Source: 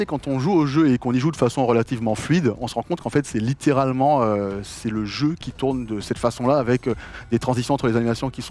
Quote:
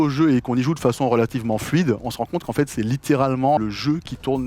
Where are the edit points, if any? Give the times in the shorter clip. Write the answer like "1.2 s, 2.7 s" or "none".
3.6 s